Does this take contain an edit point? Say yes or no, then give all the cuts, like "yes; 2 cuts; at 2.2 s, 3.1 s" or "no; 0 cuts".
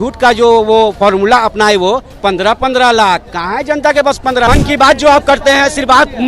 yes; 1 cut; at 4.5 s